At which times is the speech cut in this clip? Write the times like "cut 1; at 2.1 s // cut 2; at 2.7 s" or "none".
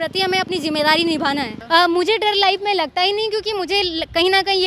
cut 1; at 1.6 s

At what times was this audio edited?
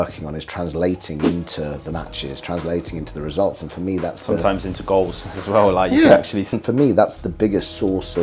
none

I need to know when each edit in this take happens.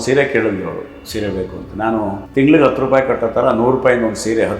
cut 1; at 2.2 s

